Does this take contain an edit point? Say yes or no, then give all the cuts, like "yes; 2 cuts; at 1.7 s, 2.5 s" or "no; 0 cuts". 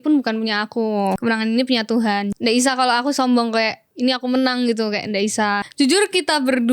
yes; 4 cuts; at 1.2 s, 2.3 s, 3.8 s, 5.6 s